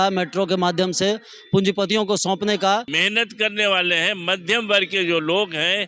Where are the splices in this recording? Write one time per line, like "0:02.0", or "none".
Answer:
0:02.9